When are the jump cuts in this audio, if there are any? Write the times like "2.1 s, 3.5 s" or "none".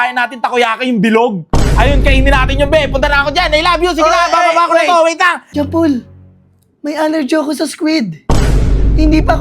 5.4 s